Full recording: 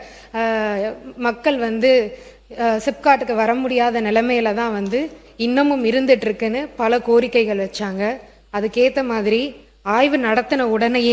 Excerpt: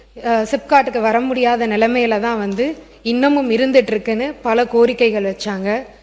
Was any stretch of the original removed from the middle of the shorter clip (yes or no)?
no